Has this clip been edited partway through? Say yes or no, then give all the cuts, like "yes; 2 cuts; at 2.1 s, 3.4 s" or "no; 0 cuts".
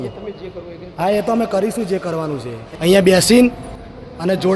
yes; 1 cut; at 2.6 s